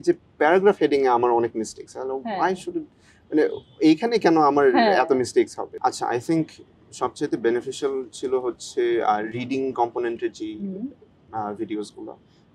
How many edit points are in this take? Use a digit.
1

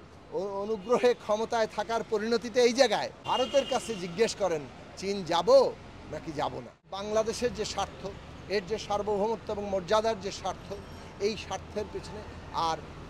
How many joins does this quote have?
2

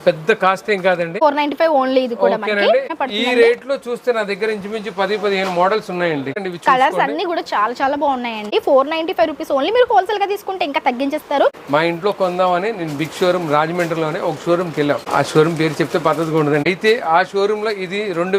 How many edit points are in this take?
7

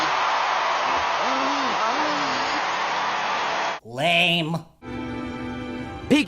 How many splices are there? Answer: 1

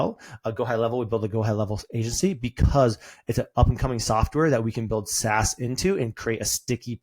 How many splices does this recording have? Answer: 0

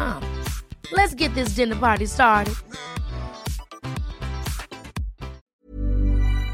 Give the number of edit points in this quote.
1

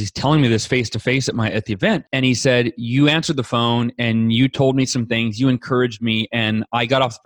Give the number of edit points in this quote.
1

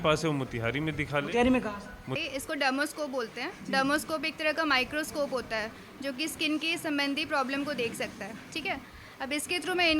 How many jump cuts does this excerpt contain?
1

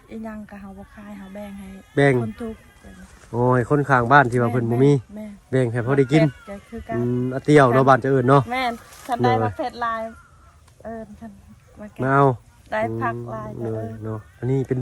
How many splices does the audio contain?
0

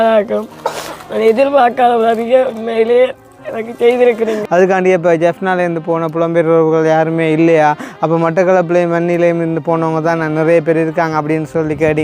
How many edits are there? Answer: 1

